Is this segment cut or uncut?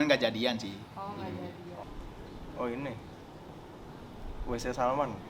cut